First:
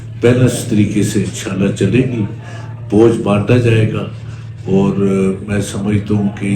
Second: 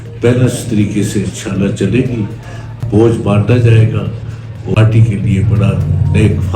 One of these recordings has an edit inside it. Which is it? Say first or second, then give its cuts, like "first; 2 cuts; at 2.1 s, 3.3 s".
second; 1 cut; at 4.8 s